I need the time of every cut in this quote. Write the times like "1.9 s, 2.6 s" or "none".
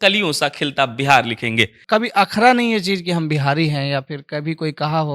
1.8 s